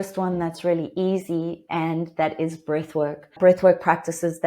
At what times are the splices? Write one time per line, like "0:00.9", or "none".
0:03.3